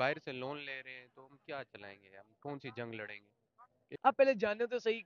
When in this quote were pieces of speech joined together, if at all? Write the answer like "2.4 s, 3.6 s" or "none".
3.8 s